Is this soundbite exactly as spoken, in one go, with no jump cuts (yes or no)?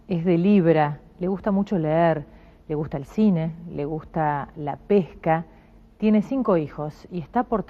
no